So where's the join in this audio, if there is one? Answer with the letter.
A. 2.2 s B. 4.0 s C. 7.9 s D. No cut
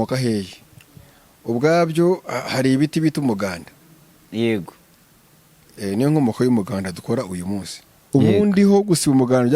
C